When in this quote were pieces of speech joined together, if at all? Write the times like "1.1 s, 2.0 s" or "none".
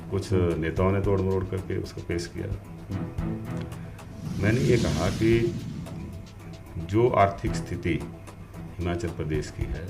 none

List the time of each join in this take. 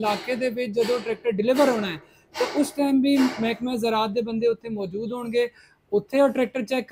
none

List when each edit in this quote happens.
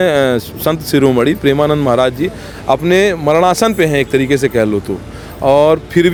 none

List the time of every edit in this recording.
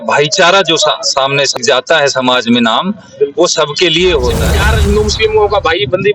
1.6 s, 4.6 s

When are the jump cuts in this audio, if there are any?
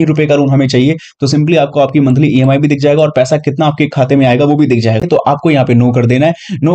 5.1 s

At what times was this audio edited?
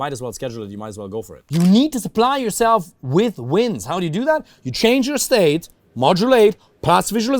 1.4 s

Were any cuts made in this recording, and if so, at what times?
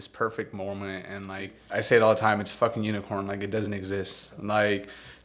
1.6 s

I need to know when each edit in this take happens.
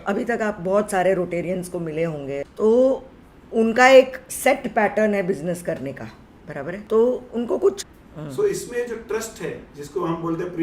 2.5 s, 6.8 s, 7.9 s

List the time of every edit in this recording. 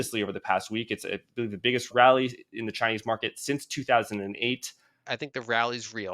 1.9 s, 5.0 s

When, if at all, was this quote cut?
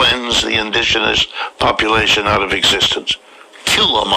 none

